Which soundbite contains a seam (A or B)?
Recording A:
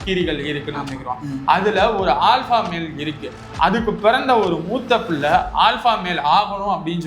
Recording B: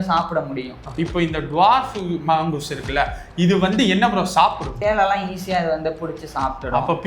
B